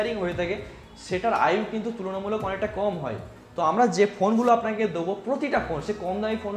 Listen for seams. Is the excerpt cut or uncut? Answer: uncut